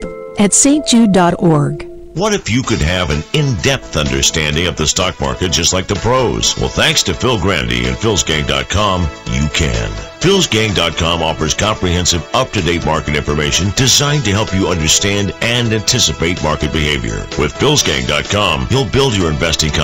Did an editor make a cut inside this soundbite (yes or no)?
yes